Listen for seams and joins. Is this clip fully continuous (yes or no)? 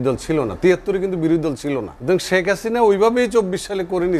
no